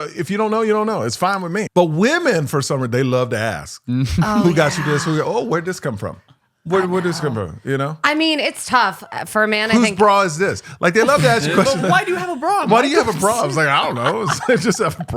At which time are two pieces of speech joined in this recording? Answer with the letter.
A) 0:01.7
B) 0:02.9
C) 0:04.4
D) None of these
A